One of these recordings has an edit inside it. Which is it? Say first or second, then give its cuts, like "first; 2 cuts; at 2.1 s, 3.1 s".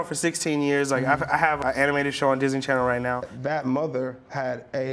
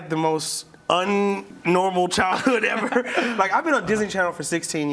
first; 2 cuts; at 1.6 s, 3.2 s